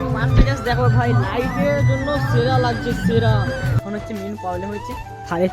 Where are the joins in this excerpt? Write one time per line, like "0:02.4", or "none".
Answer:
0:03.7